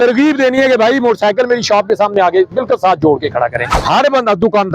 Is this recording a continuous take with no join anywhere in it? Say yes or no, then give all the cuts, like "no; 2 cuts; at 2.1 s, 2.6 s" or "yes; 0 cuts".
no; 1 cut; at 3.8 s